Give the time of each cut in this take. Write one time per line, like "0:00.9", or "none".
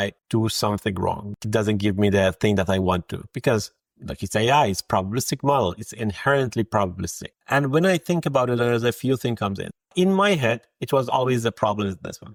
none